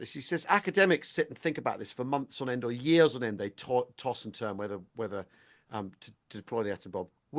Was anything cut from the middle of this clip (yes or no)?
no